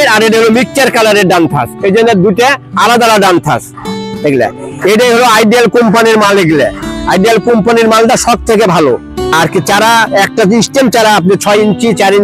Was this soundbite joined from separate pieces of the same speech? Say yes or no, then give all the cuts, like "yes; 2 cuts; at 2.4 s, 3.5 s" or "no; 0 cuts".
yes; 1 cut; at 9.2 s